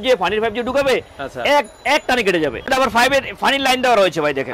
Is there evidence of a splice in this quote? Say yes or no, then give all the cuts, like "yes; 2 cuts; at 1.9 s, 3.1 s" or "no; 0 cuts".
no; 0 cuts